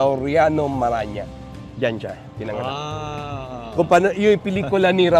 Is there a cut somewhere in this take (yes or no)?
no